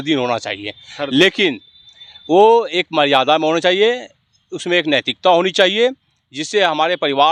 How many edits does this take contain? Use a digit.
0